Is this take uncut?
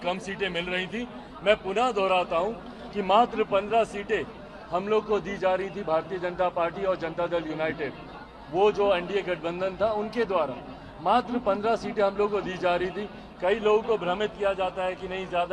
yes; 0 cuts

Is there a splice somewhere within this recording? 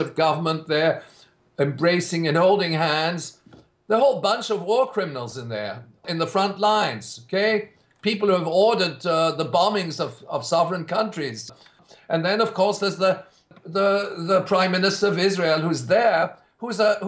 yes; 1 cut; at 11.6 s

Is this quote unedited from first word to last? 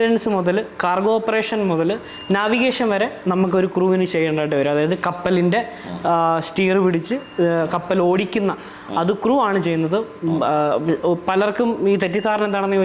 yes; 0 cuts

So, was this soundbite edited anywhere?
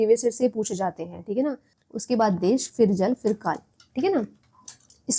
yes; 1 cut; at 1.8 s

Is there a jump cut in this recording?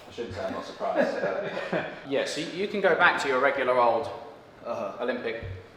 yes; 1 cut; at 2.0 s

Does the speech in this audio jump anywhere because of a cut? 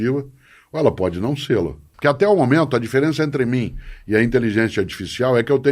yes; 1 cut; at 1.8 s

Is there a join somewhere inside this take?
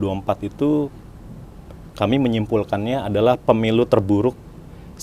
no; 0 cuts

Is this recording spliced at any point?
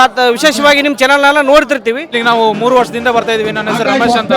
yes; 1 cut; at 2.1 s

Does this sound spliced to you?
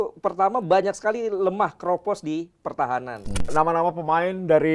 yes; 1 cut; at 3.5 s

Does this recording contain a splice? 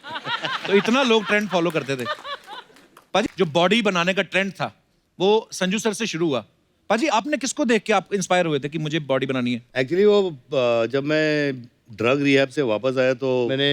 yes; 1 cut; at 3.2 s

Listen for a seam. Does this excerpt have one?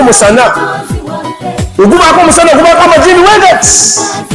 no; 0 cuts

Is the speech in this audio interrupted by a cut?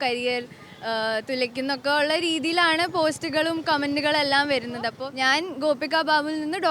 yes; 1 cut; at 5.0 s

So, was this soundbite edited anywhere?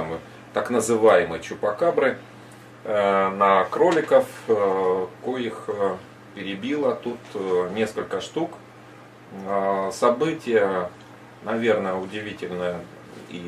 no; 0 cuts

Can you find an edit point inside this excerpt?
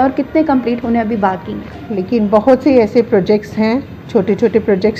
yes; 1 cut; at 1.8 s

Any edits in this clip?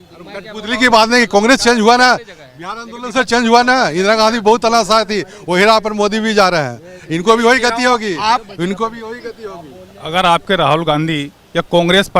no; 0 cuts

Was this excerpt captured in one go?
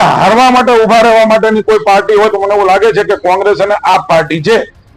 yes; 0 cuts

